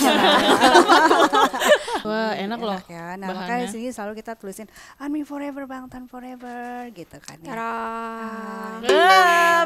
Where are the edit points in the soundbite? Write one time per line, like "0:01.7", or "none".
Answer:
0:01.9